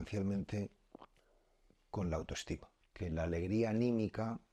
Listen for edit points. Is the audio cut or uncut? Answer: cut